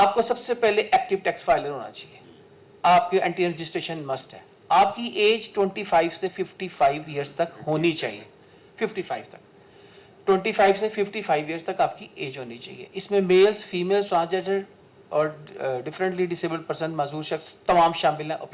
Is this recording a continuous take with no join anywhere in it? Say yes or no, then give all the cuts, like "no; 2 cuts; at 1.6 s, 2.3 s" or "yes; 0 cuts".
yes; 0 cuts